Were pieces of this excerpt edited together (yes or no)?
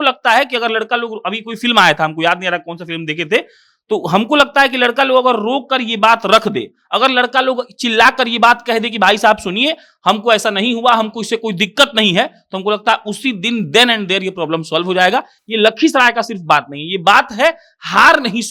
no